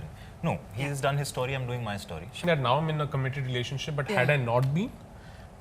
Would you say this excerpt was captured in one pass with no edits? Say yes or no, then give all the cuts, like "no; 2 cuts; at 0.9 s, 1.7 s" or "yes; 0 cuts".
no; 1 cut; at 2.4 s